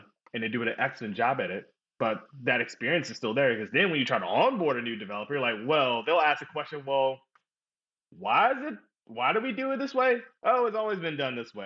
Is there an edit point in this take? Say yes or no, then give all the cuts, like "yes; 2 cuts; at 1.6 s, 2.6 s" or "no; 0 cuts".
no; 0 cuts